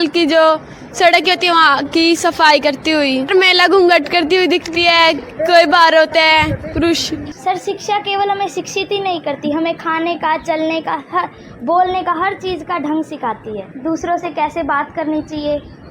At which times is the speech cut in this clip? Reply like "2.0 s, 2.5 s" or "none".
3.3 s, 7.3 s, 13.7 s